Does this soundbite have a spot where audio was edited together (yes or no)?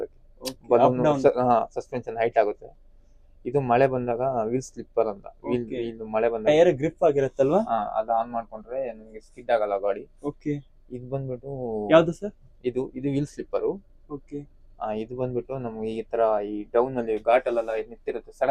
no